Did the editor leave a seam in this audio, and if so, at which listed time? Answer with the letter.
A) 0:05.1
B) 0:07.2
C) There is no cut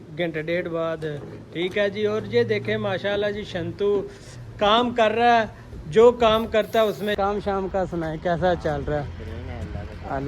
B